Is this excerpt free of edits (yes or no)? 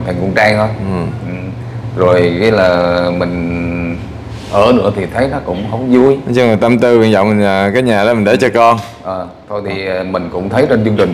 yes